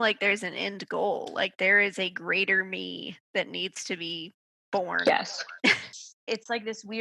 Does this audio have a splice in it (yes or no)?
yes